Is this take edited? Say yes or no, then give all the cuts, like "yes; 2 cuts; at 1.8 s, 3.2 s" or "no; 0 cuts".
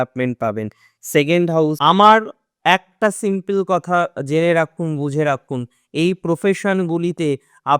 yes; 1 cut; at 1.8 s